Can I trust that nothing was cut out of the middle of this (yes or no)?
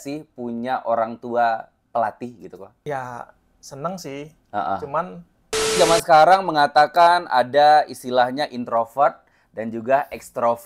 no